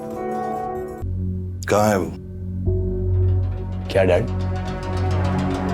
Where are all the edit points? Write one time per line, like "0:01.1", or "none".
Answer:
0:01.1